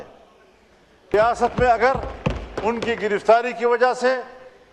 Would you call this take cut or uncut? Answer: cut